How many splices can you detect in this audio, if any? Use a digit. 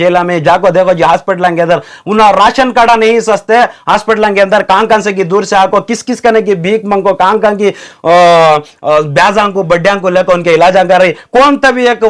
0